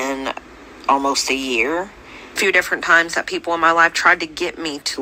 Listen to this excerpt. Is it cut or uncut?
cut